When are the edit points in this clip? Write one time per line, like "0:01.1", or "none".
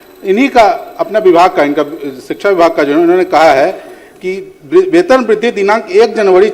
none